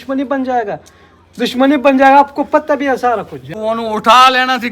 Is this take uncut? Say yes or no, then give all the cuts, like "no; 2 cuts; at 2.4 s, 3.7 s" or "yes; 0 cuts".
no; 1 cut; at 3.5 s